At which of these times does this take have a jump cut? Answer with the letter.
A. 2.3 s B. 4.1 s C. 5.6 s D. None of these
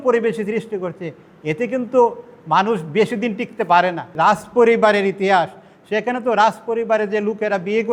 B